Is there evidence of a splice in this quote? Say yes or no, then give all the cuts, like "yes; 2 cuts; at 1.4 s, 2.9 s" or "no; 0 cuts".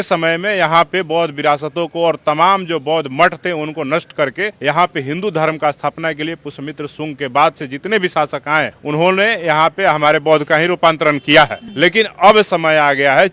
no; 0 cuts